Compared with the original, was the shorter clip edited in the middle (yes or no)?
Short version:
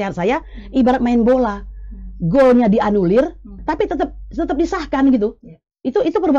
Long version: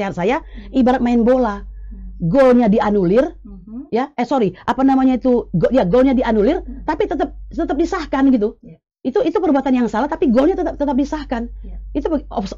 yes